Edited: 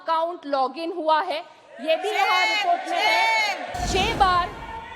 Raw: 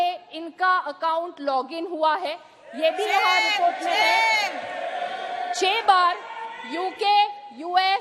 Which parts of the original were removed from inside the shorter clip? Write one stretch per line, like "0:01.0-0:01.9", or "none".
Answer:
0:04.7-0:05.4